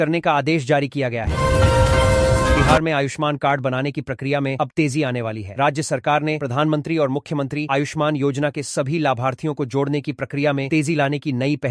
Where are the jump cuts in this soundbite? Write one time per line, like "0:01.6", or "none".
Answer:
0:01.3
0:02.6